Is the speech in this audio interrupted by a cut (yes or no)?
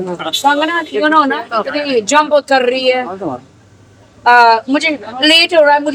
no